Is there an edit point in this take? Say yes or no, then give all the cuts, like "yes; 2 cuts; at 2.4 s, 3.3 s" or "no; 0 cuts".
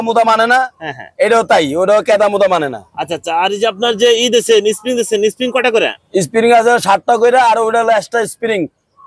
no; 0 cuts